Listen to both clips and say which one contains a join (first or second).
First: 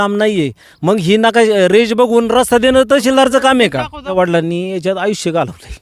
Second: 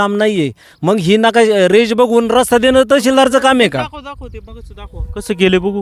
first